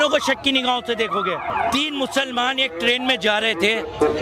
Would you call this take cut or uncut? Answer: cut